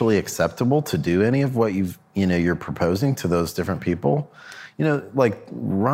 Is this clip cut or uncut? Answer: uncut